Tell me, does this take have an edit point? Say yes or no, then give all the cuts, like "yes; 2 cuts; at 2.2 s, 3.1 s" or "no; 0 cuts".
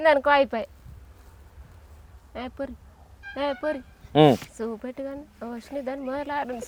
no; 0 cuts